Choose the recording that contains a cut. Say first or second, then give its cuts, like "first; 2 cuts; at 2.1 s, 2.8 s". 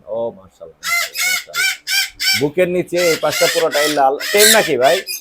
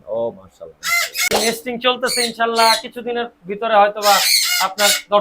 second; 1 cut; at 1.3 s